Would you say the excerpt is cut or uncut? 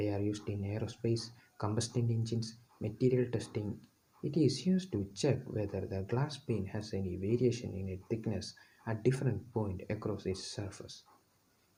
uncut